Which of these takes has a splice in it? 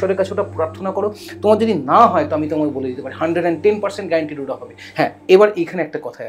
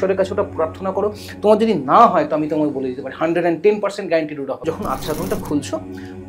second; 1 cut; at 4.5 s

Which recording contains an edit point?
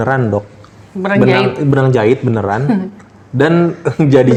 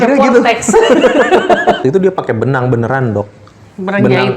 second; 1 cut; at 1.8 s

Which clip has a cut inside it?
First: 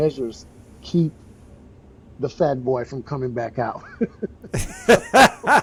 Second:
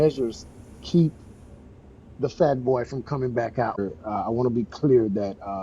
second; 1 cut; at 3.8 s

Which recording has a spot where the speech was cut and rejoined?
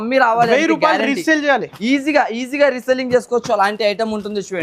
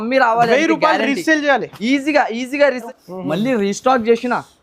second; 1 cut; at 2.8 s

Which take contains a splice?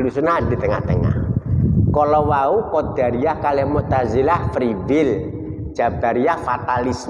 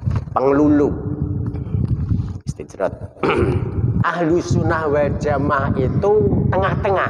second; 1 cut; at 4.0 s

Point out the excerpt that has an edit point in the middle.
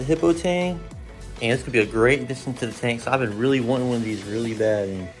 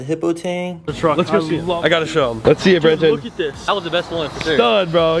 second; 2 cuts; at 0.9 s, 3.7 s

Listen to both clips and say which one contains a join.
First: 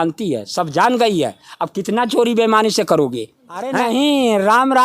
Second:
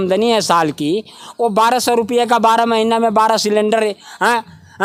first; 1 cut; at 3.7 s

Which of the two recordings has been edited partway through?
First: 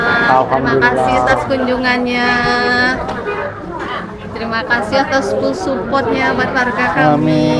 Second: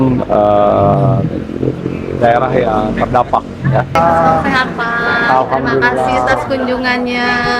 second; 1 cut; at 3.9 s

